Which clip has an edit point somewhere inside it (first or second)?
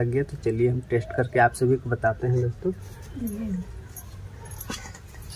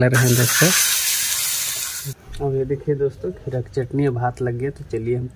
second